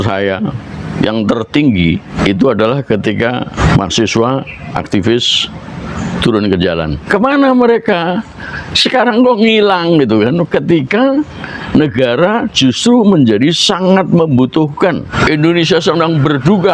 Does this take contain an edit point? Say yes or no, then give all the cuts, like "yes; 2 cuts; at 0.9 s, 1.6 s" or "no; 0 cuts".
yes; 4 cuts; at 2.1 s, 3.6 s, 7.0 s, 15.1 s